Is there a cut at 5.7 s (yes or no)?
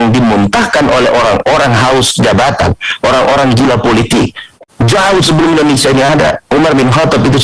no